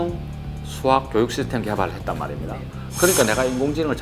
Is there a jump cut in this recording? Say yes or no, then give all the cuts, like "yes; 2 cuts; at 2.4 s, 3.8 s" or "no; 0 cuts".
no; 0 cuts